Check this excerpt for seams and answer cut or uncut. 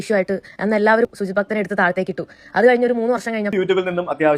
cut